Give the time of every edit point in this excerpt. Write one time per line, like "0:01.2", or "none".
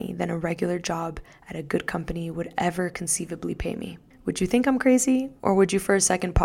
0:05.3